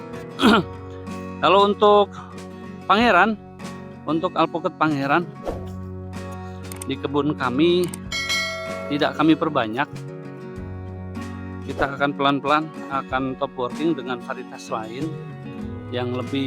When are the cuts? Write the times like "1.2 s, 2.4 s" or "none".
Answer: 5.4 s, 6.9 s